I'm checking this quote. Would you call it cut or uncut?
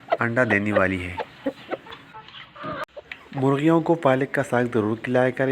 cut